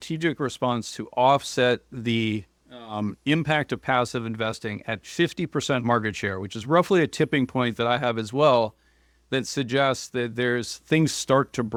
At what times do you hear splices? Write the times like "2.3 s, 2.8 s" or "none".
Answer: none